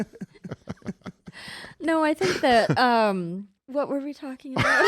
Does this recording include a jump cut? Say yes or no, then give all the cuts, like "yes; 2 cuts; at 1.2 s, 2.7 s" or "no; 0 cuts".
yes; 1 cut; at 3.5 s